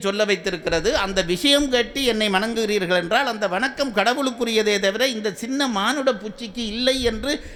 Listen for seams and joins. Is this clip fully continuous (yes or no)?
yes